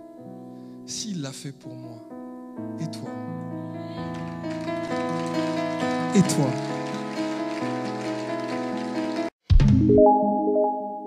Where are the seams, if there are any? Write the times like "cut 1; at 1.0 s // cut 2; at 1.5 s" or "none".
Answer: cut 1; at 9.3 s